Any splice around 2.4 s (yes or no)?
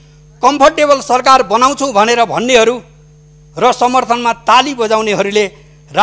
no